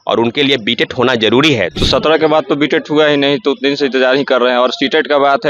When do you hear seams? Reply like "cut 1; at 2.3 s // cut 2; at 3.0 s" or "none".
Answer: cut 1; at 1.7 s